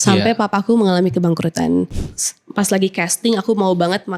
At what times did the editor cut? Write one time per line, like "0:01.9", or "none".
0:02.0